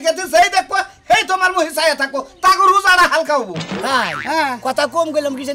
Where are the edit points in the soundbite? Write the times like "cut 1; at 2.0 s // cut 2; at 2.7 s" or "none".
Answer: cut 1; at 3.8 s